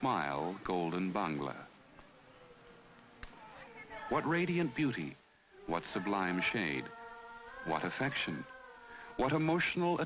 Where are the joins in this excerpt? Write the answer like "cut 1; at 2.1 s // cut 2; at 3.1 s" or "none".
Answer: cut 1; at 1.3 s